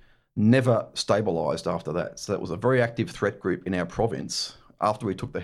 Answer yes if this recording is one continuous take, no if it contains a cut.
yes